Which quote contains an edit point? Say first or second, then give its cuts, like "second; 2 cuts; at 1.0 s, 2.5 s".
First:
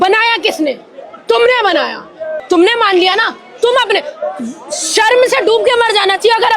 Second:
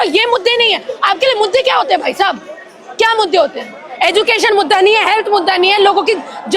first; 1 cut; at 2.3 s